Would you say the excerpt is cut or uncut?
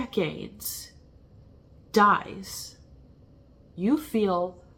uncut